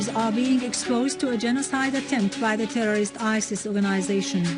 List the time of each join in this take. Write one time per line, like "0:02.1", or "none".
0:03.2